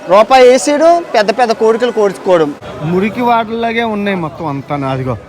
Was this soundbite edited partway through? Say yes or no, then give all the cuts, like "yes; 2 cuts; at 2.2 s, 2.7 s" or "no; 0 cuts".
yes; 1 cut; at 2.6 s